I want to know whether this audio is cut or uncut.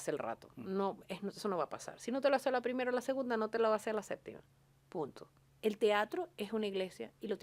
cut